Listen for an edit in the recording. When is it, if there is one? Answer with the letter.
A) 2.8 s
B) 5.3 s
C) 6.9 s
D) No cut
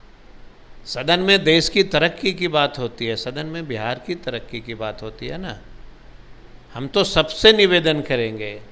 D